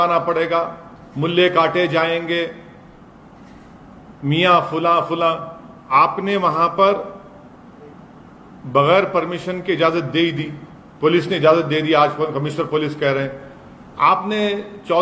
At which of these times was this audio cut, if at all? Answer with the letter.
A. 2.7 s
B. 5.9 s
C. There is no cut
B